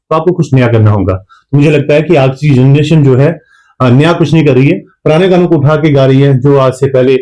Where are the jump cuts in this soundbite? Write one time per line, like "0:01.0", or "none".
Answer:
none